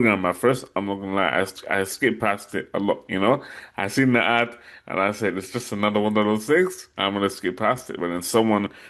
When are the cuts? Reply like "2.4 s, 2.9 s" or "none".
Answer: none